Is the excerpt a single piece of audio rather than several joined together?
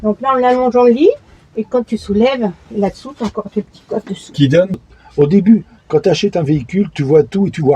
no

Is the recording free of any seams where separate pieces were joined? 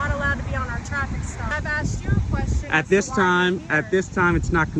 no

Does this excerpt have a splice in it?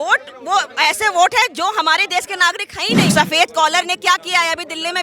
yes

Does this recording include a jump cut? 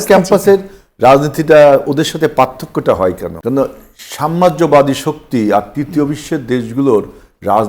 yes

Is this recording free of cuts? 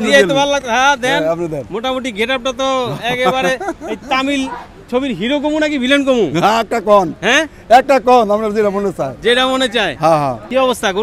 yes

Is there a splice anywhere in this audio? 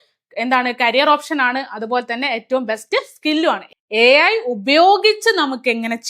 yes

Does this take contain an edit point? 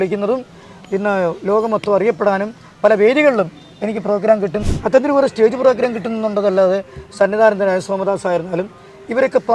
yes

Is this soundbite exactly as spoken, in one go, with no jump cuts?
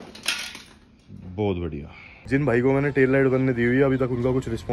no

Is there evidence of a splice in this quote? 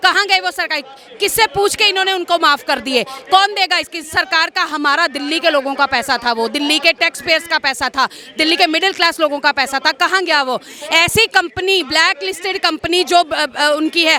no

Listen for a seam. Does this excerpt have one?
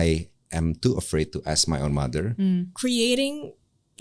yes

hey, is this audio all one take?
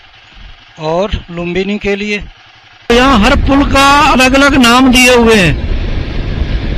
no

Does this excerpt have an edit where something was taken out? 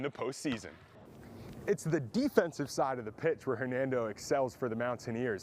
yes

